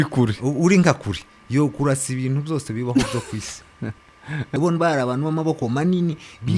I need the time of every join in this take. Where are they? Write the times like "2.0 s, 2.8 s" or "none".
4.5 s